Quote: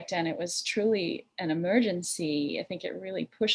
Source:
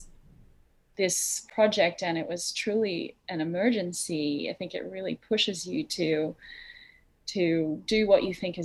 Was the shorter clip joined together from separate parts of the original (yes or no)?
no